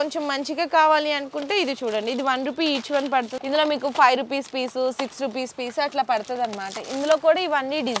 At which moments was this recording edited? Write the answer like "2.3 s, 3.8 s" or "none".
3.3 s